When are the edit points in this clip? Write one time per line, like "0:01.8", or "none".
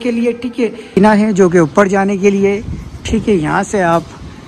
0:01.0